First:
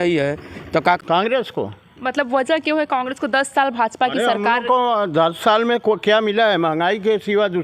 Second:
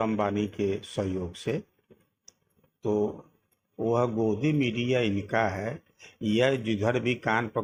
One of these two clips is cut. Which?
first; 1 cut; at 1.0 s

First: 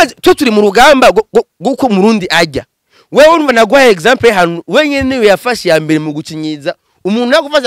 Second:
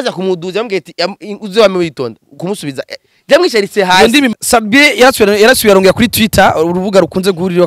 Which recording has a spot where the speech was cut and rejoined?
second; 1 cut; at 4.3 s

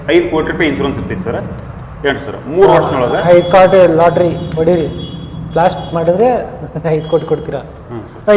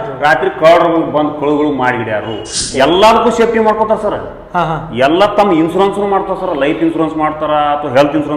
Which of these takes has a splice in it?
second; 1 cut; at 2.7 s

